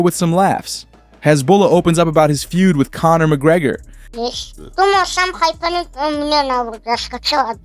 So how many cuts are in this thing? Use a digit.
1